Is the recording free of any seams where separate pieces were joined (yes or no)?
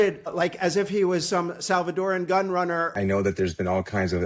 no